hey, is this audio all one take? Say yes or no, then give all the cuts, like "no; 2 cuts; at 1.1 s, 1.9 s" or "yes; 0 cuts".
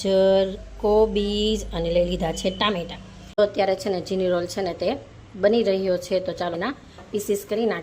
no; 2 cuts; at 3.3 s, 6.6 s